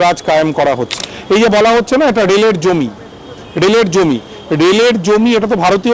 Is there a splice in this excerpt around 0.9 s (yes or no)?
yes